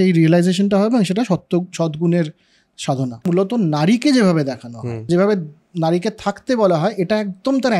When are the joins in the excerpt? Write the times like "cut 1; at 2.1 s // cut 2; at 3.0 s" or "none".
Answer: cut 1; at 3.3 s // cut 2; at 5.1 s